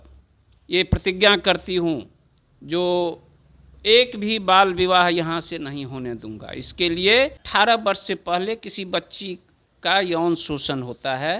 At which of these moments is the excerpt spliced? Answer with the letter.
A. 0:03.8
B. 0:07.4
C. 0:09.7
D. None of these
B